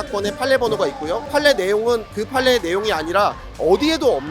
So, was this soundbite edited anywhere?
yes; 1 cut; at 1.2 s

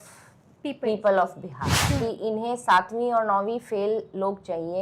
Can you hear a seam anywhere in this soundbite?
yes; 1 cut; at 1.9 s

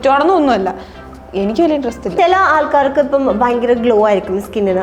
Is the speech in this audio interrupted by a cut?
yes; 1 cut; at 2.1 s

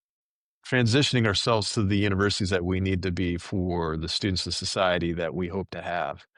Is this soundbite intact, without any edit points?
yes; 0 cuts

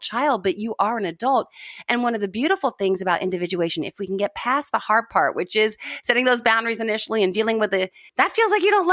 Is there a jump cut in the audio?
yes; 1 cut; at 8.0 s

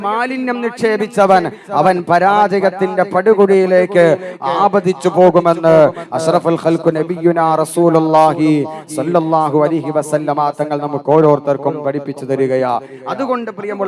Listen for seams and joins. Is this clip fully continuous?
yes; 0 cuts

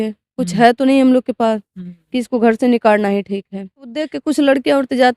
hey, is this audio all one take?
no; 1 cut; at 4.1 s

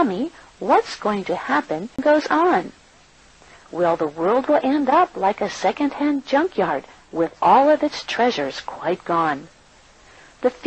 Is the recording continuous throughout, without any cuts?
no; 1 cut; at 2.0 s

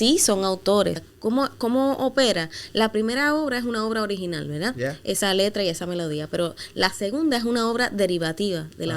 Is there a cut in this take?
yes; 1 cut; at 1.1 s

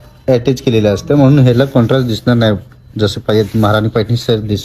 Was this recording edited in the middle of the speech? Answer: no; 0 cuts

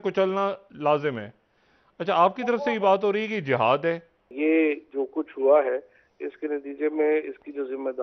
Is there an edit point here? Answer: yes; 1 cut; at 4.1 s

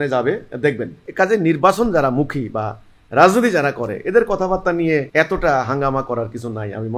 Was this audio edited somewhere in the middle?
yes; 2 cuts; at 1.0 s, 5.1 s

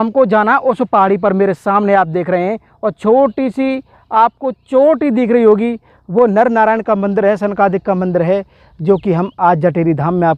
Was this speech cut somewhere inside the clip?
no; 0 cuts

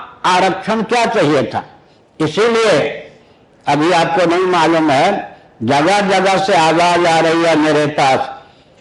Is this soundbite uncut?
yes; 0 cuts

